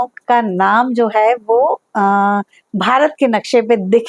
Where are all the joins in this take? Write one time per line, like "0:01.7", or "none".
none